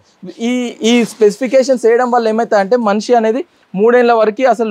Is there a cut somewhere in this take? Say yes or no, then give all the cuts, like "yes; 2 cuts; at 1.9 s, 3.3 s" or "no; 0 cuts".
no; 0 cuts